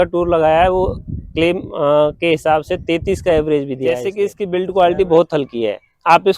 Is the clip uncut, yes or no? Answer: no